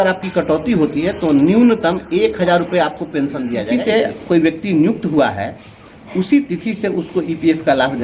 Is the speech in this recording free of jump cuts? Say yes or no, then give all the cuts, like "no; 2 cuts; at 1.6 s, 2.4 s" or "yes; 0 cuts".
no; 1 cut; at 3.6 s